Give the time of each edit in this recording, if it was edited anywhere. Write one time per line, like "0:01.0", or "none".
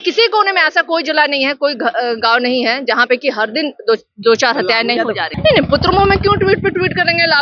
0:05.3